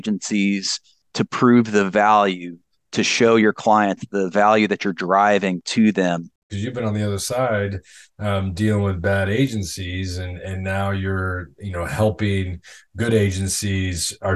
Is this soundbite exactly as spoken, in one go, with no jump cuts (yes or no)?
no